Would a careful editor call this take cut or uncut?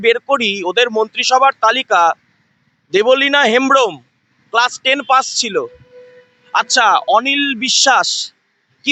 uncut